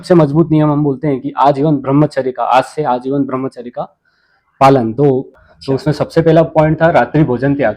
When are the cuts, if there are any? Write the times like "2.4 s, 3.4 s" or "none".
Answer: 5.3 s